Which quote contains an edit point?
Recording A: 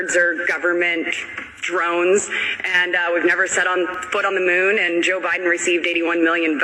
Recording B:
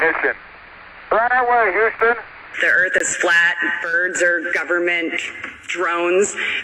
B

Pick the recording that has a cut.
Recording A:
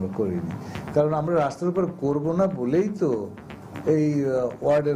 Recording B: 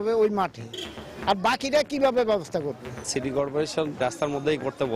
B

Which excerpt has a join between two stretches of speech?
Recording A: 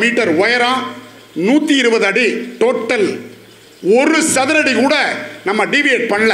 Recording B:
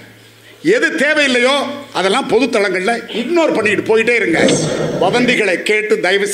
B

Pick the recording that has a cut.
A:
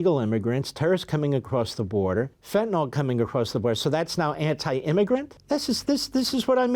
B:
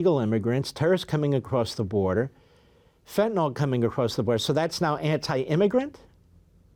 A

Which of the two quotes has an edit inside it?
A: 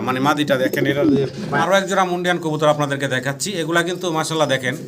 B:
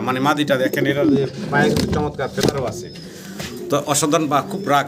A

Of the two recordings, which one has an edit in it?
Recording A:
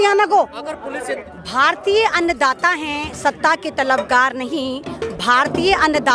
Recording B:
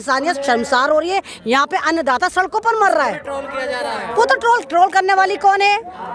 A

